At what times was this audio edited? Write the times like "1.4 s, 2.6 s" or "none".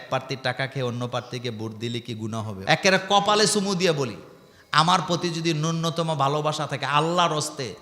2.5 s